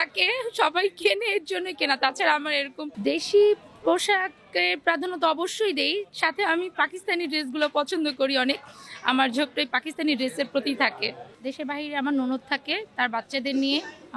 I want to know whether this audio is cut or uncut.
cut